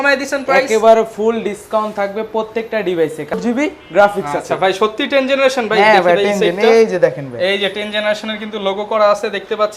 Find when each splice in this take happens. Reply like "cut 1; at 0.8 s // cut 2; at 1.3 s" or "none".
cut 1; at 3.3 s